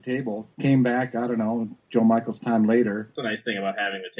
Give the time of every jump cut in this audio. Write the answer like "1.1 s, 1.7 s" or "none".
3.1 s